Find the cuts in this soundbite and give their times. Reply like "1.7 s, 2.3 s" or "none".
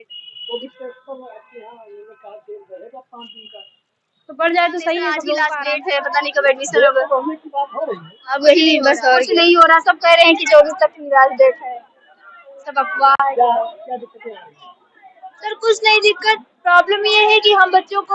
5.5 s